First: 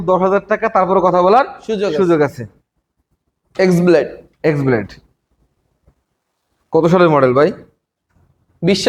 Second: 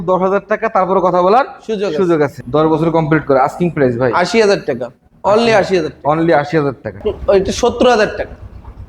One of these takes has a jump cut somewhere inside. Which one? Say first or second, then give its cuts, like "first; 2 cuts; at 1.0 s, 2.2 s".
second; 2 cuts; at 2.4 s, 7.0 s